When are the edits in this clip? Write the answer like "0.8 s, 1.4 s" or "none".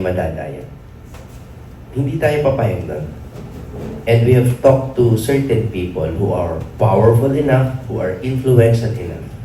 none